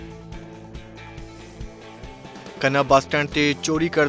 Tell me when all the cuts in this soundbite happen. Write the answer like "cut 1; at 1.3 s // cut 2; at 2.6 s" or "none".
cut 1; at 1.9 s